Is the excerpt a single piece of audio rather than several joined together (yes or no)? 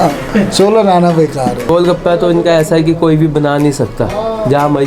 no